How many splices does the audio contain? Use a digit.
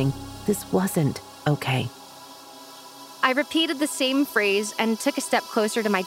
1